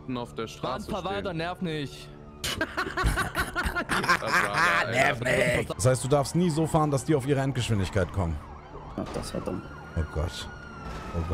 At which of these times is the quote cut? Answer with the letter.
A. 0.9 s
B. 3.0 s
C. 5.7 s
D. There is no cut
C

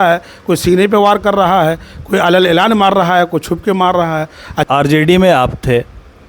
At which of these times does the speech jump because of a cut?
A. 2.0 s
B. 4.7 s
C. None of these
B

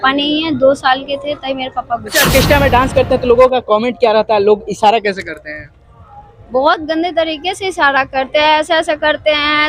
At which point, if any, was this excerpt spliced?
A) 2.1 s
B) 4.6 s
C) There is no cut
A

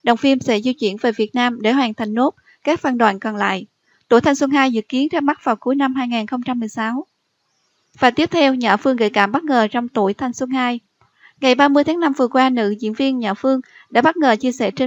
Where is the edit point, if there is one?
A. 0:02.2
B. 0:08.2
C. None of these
C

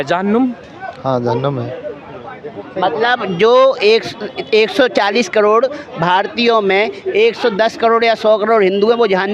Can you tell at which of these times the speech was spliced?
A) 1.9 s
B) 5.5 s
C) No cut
C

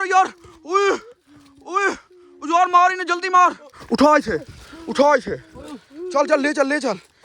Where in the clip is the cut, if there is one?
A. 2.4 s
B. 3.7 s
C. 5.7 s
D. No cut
B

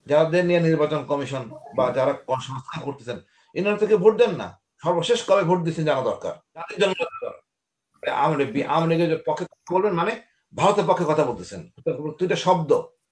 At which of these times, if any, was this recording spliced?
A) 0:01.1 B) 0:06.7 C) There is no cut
B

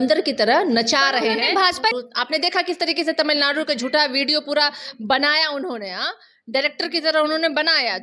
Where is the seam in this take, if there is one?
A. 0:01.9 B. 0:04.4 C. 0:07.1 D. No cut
A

